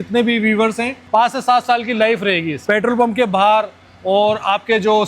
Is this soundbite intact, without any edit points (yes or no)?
no